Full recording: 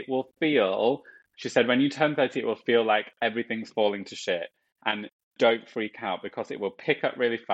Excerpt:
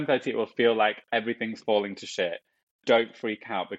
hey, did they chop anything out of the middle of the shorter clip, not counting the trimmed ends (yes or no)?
yes